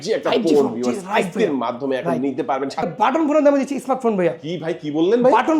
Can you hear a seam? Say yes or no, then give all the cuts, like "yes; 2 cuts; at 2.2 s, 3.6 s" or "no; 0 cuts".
yes; 1 cut; at 2.9 s